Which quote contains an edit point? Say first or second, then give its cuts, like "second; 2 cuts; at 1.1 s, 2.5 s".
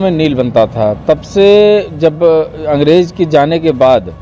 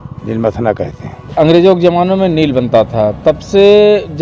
second; 1 cut; at 1.2 s